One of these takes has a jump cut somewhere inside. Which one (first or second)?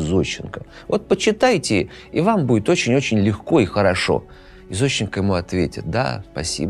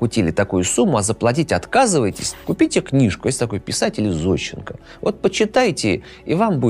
second